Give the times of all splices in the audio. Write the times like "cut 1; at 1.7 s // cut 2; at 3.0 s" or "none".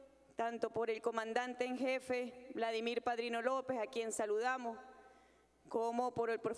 cut 1; at 4.6 s